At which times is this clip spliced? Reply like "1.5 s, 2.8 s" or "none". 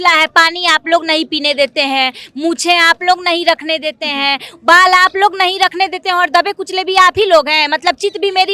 none